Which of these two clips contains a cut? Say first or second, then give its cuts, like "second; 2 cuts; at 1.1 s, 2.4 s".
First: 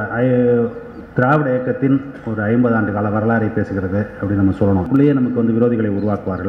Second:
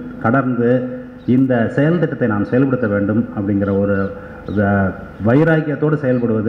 first; 1 cut; at 4.9 s